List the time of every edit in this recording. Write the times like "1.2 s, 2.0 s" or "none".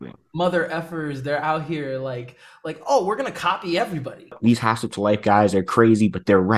4.4 s